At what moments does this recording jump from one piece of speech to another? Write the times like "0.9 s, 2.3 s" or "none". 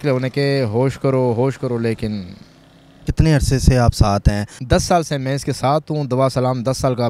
3.0 s, 4.5 s